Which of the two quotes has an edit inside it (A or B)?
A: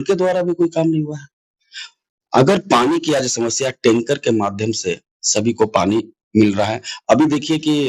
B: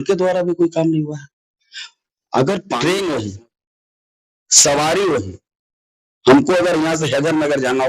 B